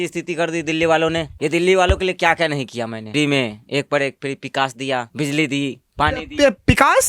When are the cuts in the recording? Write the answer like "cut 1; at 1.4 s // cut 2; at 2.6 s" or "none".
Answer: cut 1; at 1.3 s // cut 2; at 3.1 s // cut 3; at 5.1 s